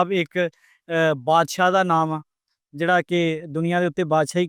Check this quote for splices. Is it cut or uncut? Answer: uncut